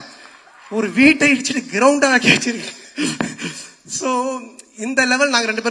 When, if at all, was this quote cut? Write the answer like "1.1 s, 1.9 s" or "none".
none